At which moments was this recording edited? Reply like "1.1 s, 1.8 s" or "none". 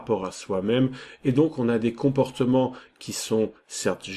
2.6 s